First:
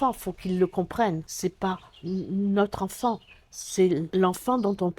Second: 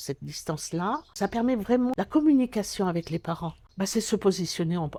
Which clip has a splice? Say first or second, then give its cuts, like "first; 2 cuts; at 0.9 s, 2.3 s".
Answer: first; 2 cuts; at 1.3 s, 4.1 s